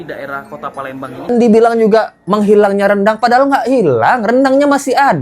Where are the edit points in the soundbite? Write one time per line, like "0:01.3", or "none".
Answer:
0:01.3